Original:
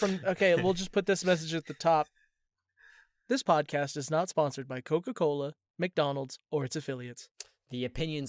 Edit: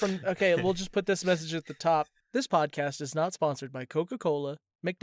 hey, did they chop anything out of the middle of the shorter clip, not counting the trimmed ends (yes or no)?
yes